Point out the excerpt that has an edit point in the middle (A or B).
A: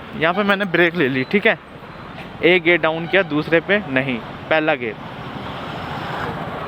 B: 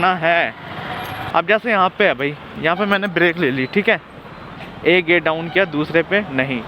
B